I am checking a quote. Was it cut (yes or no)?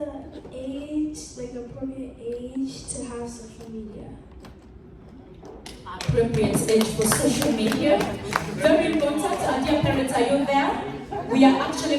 no